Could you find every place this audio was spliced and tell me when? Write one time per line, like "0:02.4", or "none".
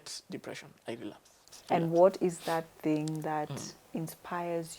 0:01.5